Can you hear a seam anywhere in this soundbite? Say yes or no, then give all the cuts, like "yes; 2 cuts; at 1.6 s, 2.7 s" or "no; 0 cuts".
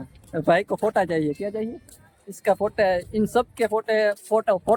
no; 0 cuts